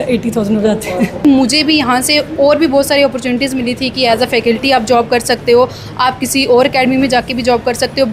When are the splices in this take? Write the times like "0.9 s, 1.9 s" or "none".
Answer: 1.2 s